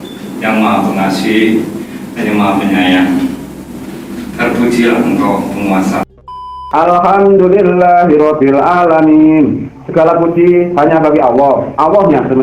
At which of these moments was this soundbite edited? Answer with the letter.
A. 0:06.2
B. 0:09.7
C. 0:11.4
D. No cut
A